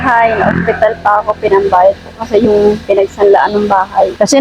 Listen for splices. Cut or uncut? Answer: uncut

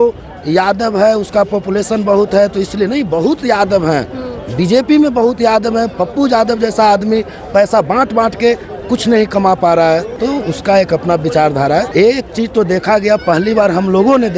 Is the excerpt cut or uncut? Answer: cut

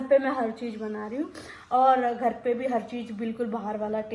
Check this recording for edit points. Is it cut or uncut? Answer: uncut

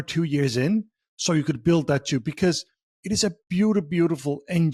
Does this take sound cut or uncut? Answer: uncut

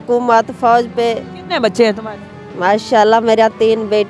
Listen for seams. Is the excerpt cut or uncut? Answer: cut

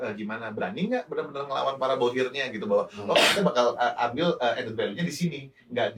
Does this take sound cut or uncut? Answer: uncut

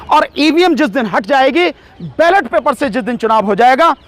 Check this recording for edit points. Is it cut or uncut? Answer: uncut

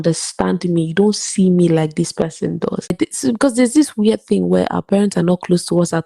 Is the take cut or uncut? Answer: cut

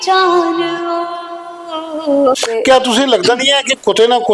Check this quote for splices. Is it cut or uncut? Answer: cut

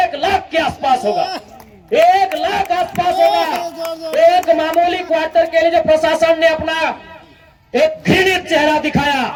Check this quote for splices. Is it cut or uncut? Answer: uncut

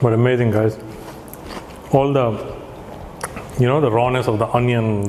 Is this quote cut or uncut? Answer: uncut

